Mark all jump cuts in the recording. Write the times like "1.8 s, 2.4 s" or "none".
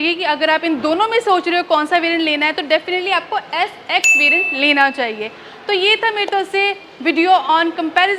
none

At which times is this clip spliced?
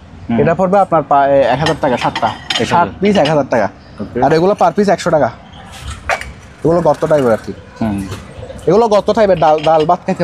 none

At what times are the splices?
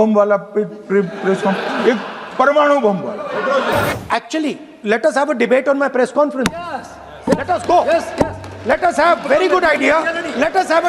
3.9 s

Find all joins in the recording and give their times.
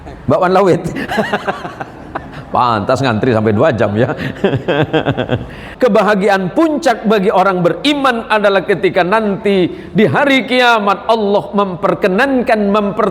5.6 s

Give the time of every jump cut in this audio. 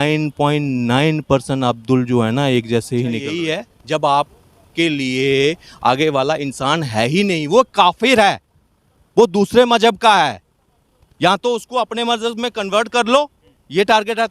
3.5 s

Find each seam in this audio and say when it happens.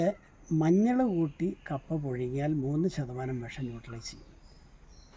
none

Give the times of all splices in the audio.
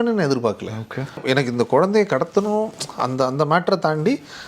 1.2 s

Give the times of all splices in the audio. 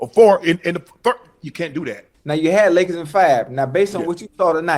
2.1 s

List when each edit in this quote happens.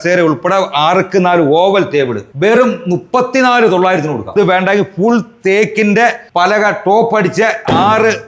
4.3 s, 6.2 s

